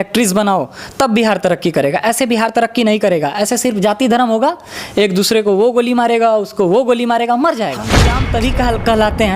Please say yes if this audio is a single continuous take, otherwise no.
no